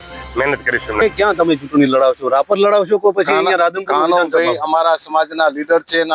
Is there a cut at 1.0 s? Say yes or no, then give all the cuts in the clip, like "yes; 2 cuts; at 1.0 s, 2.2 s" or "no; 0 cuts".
yes; 1 cut; at 1.0 s